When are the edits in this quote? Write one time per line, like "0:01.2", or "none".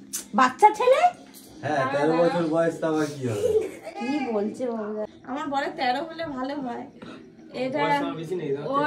none